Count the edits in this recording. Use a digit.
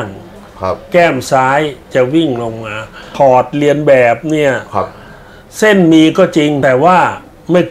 2